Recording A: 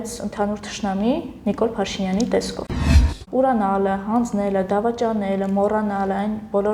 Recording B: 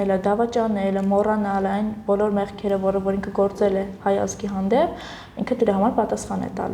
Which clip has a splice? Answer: A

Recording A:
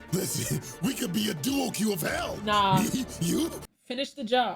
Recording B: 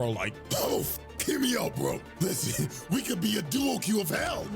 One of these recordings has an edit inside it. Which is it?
A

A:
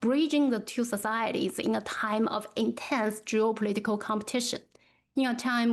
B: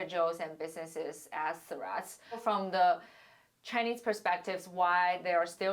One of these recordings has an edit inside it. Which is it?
B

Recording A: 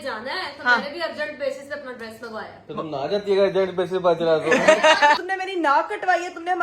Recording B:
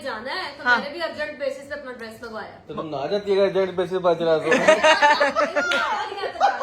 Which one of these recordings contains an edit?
A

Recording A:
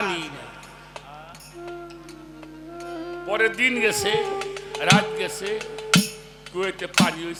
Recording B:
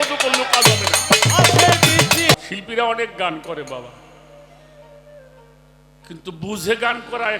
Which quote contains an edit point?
B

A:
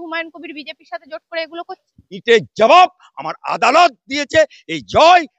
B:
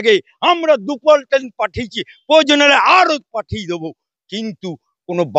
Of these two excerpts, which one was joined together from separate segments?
A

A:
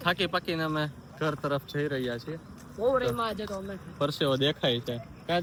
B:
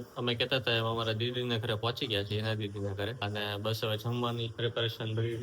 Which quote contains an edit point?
B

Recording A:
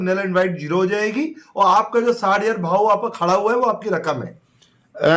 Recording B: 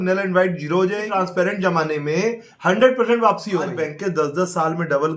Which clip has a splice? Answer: B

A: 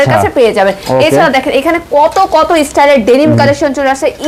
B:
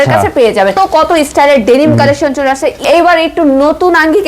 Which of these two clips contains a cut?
B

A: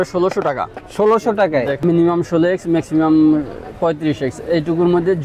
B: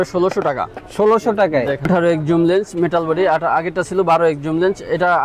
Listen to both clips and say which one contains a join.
A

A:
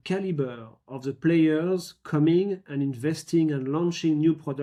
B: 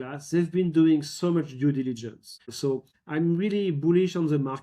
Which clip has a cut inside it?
B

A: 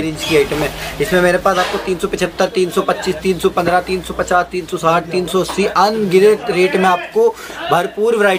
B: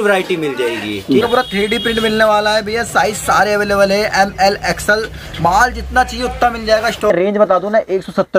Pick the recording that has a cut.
B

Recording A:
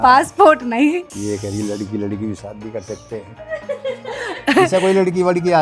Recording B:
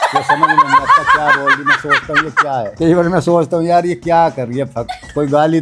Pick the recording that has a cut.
A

